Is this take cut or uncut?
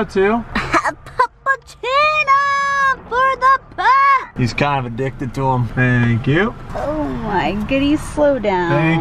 cut